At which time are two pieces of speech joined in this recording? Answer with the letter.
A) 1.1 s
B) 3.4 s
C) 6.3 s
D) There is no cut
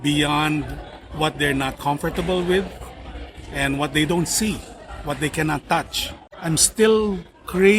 C